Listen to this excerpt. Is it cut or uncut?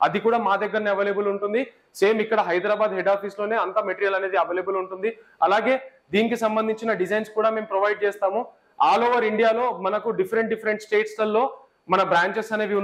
uncut